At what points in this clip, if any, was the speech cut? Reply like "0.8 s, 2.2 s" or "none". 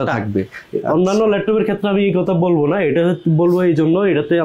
none